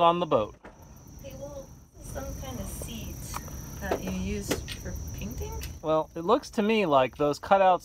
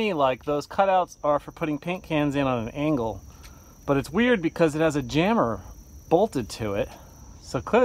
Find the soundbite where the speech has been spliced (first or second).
first